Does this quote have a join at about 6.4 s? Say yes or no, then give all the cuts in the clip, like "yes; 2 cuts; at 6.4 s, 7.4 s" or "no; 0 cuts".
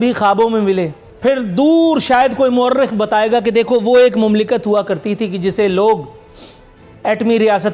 no; 1 cut; at 1.0 s